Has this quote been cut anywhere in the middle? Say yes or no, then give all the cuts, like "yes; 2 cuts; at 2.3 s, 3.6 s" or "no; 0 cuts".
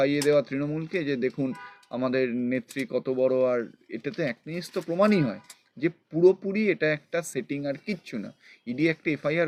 no; 0 cuts